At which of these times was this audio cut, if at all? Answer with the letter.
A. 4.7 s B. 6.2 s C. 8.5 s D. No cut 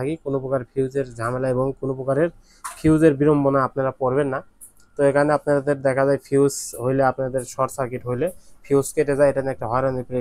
D